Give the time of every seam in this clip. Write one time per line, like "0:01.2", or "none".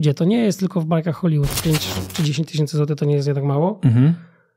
0:01.5